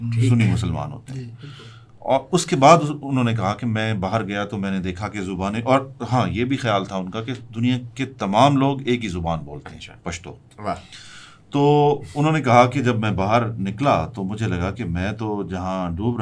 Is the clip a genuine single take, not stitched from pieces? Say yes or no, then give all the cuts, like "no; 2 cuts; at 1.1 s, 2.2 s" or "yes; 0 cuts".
yes; 0 cuts